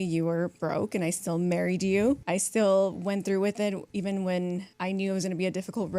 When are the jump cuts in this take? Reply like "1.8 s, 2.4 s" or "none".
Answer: 2.2 s, 3.8 s, 4.7 s